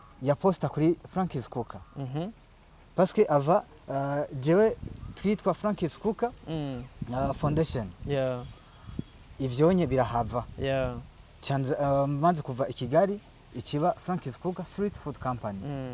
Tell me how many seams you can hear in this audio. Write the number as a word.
zero